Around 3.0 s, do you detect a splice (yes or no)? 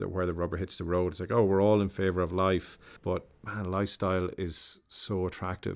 yes